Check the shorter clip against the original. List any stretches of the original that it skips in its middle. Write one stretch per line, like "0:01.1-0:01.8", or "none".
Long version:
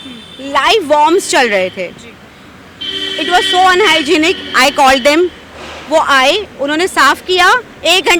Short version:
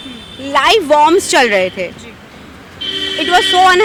none